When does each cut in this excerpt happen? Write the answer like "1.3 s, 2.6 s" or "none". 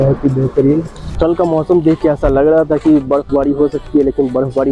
1.0 s